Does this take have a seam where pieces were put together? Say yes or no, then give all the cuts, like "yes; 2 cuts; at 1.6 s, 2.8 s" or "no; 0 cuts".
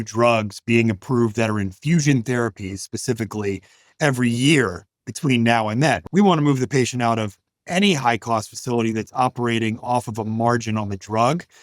yes; 1 cut; at 6.0 s